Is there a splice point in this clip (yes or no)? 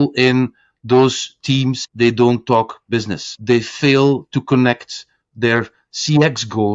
yes